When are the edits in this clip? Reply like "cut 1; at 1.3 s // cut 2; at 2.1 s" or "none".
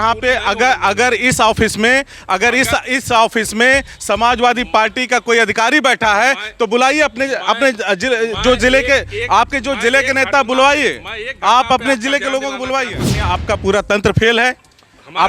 cut 1; at 13.0 s